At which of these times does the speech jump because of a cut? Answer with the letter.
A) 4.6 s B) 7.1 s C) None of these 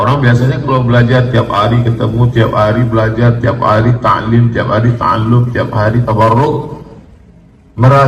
C